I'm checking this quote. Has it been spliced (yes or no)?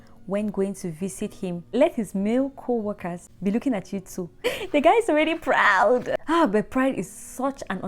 yes